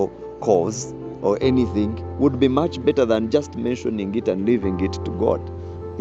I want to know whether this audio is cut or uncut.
uncut